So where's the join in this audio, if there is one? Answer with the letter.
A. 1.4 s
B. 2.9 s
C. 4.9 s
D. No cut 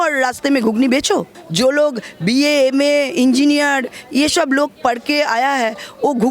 A